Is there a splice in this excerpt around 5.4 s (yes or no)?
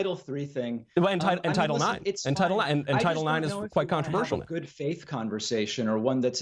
yes